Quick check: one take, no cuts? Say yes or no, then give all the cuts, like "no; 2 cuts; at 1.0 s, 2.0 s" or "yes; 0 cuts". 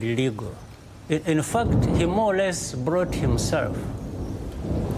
yes; 0 cuts